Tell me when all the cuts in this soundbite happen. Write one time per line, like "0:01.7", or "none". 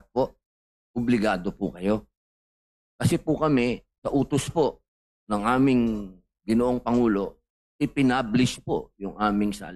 0:03.9